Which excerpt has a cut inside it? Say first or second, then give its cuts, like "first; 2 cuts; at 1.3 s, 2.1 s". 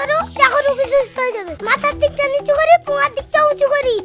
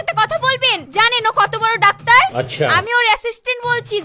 first; 1 cut; at 1.4 s